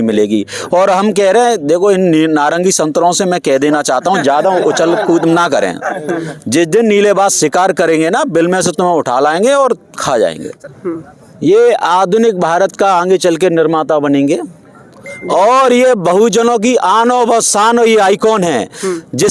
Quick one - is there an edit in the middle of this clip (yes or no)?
yes